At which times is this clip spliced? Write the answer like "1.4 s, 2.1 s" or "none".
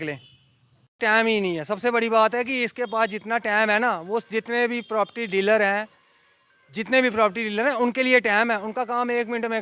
1.0 s

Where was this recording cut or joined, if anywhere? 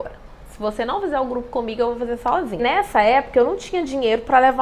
2.6 s

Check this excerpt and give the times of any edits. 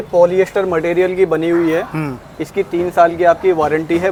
none

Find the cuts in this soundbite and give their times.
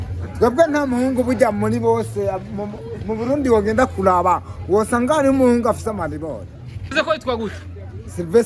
6.9 s

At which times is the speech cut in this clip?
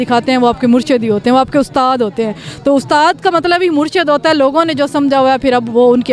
none

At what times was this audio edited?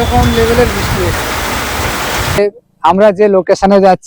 2.4 s

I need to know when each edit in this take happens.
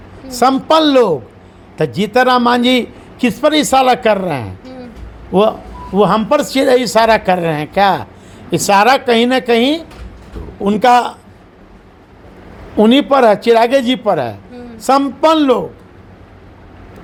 none

